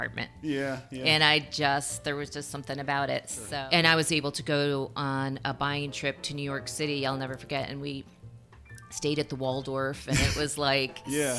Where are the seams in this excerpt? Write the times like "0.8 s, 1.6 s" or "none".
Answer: 3.4 s